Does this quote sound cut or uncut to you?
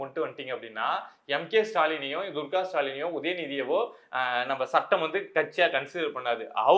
uncut